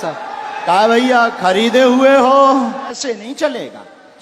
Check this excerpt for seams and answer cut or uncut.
cut